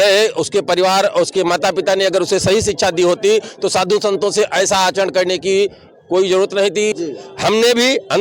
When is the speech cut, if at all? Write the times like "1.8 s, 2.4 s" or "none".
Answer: 7.0 s